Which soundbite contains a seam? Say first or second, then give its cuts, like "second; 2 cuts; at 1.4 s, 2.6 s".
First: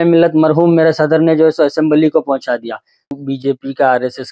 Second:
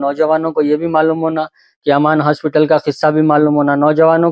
first; 1 cut; at 3.2 s